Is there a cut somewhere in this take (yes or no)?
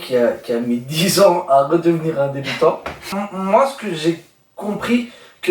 yes